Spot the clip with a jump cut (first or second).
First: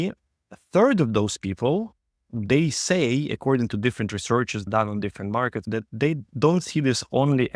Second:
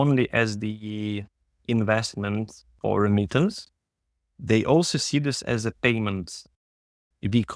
first